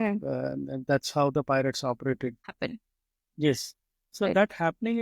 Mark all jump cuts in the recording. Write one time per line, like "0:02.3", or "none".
0:02.5